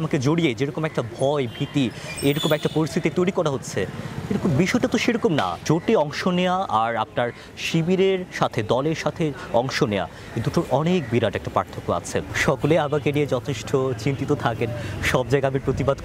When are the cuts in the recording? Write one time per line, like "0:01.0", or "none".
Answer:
0:05.6
0:12.3